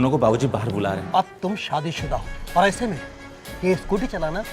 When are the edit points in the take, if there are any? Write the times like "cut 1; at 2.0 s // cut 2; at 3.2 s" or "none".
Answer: cut 1; at 1.0 s